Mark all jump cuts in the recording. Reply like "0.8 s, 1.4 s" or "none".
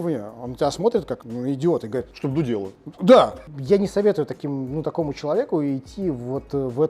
1.2 s, 3.4 s